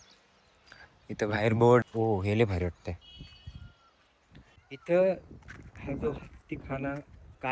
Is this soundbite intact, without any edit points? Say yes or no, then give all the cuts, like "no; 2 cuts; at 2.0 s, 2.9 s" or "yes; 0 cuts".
no; 2 cuts; at 1.8 s, 4.6 s